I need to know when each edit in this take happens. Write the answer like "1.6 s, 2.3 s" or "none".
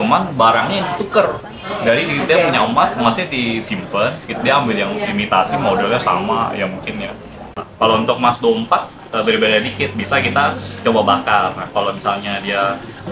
7.6 s